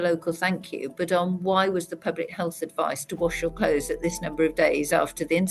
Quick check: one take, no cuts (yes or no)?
yes